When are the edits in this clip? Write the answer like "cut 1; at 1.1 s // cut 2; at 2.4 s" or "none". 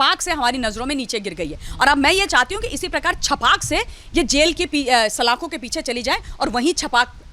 none